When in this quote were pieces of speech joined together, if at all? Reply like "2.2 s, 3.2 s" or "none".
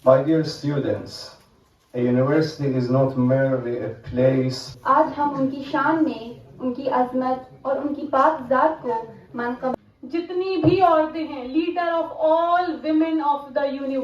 4.6 s, 9.7 s